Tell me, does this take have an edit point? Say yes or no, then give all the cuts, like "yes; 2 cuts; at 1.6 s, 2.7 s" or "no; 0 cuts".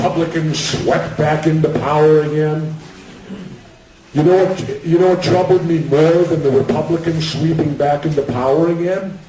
no; 0 cuts